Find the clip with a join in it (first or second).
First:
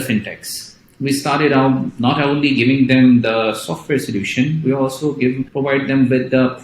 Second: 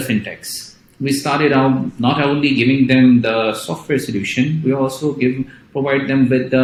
first